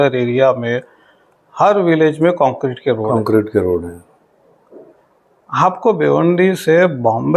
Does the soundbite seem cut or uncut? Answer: uncut